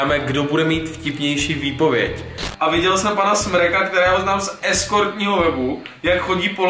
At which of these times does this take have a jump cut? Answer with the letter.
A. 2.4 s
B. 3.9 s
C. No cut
A